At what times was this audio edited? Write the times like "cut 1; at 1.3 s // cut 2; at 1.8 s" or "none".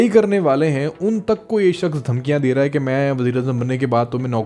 none